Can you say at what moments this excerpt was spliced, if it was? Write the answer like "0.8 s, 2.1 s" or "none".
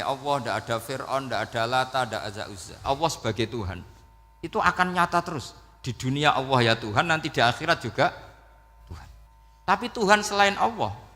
2.8 s, 9.2 s